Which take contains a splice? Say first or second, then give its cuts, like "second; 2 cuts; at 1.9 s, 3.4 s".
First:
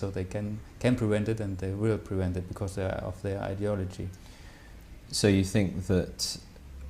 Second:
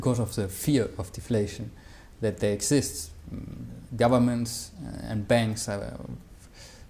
first; 1 cut; at 2.5 s